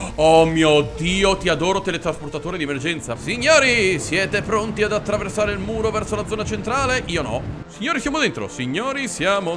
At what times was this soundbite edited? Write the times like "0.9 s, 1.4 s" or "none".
3.2 s, 7.6 s